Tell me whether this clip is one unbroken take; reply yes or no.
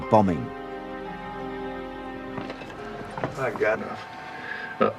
yes